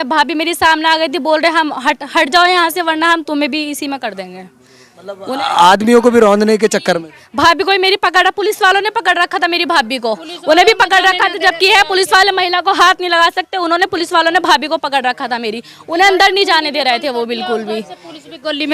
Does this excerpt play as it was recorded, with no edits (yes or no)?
yes